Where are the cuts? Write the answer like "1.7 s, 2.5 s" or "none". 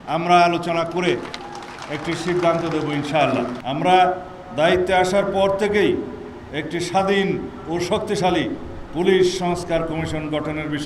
3.5 s